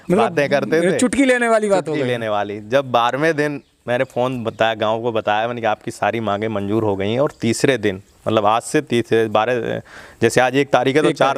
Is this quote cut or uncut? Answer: uncut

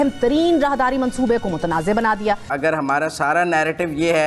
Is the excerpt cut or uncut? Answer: cut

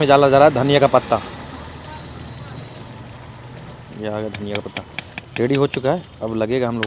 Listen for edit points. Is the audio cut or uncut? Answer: uncut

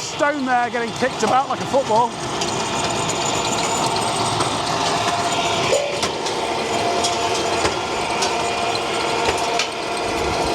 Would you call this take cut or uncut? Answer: uncut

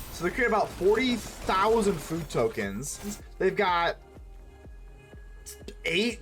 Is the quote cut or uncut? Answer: cut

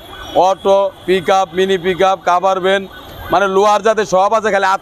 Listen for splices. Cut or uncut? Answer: uncut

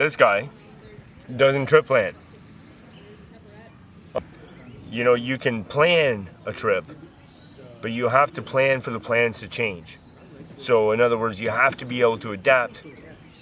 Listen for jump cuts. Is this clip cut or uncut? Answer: cut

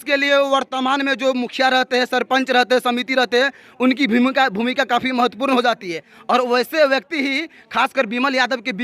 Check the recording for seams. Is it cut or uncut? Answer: uncut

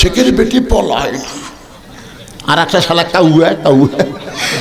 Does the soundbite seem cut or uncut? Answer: uncut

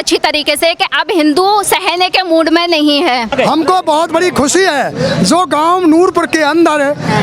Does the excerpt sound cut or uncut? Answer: cut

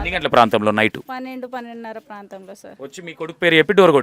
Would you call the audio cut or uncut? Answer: cut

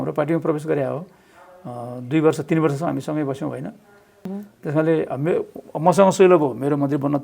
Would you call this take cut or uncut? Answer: cut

